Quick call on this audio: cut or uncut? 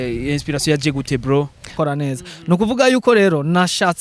cut